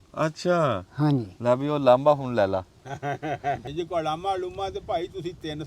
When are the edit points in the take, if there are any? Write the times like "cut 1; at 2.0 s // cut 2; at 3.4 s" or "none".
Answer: cut 1; at 3.6 s

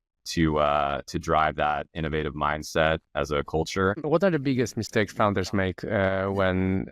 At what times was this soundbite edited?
cut 1; at 4.0 s

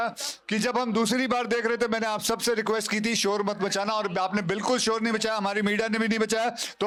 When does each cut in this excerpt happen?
none

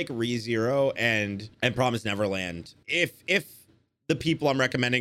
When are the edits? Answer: cut 1; at 1.5 s // cut 2; at 2.7 s

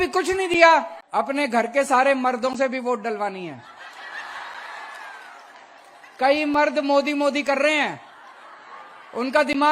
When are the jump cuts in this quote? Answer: cut 1; at 1.0 s

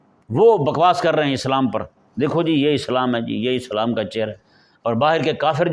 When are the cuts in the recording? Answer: none

